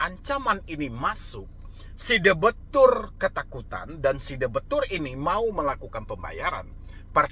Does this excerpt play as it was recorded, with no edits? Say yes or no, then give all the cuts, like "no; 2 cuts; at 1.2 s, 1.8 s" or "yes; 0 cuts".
yes; 0 cuts